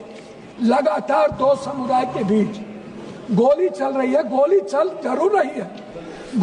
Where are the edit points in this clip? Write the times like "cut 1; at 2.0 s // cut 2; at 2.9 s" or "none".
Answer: none